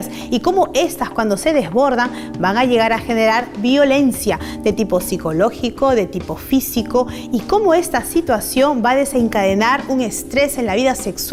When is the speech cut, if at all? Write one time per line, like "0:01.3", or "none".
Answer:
none